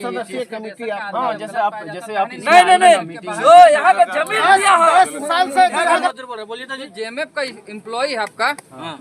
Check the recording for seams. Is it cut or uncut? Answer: cut